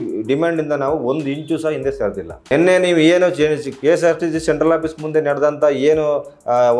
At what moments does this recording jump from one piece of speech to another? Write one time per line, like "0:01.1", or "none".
0:02.4